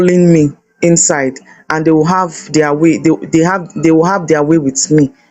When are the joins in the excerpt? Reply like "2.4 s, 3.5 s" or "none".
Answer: none

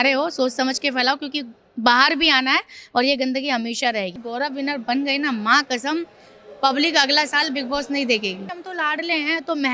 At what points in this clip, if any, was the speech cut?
4.2 s, 8.6 s

